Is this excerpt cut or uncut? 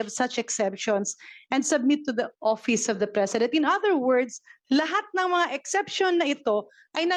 uncut